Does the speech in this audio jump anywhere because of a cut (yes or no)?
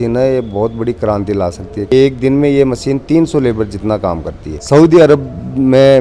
yes